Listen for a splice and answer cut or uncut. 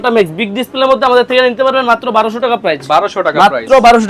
uncut